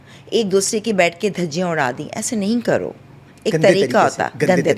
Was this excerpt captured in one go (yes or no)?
yes